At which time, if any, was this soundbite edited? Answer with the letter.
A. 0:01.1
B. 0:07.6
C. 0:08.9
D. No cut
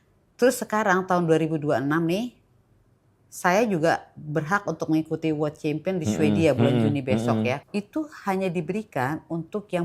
B